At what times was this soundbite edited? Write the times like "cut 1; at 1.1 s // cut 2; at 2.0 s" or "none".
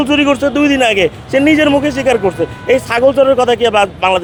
none